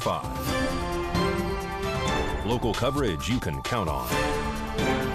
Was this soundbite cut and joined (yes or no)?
no